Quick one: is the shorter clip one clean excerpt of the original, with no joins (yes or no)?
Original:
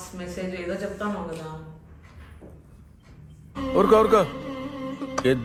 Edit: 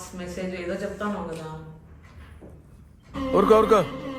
no